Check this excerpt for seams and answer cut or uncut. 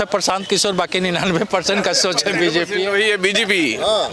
uncut